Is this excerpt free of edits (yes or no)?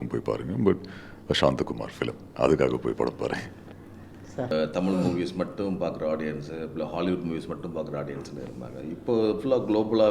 no